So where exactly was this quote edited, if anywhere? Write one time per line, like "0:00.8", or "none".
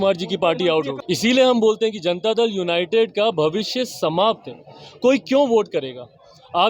0:01.0